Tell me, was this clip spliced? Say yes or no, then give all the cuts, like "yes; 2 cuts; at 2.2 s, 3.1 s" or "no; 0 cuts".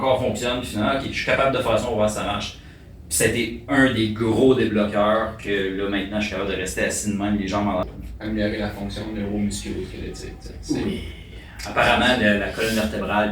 yes; 1 cut; at 7.8 s